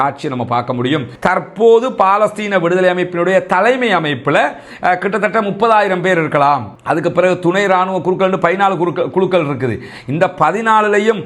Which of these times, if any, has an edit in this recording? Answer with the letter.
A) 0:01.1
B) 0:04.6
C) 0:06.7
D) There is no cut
A